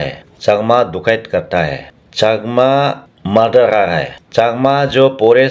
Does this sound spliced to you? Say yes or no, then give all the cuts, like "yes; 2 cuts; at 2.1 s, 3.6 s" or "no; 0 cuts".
yes; 1 cut; at 4.1 s